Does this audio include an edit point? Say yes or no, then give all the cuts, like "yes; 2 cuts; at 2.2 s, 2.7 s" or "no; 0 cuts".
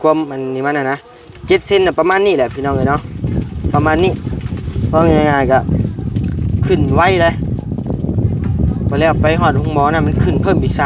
no; 0 cuts